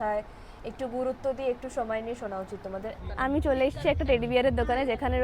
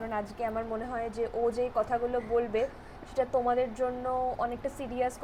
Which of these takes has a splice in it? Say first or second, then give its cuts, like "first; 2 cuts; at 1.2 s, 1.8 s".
first; 1 cut; at 3.0 s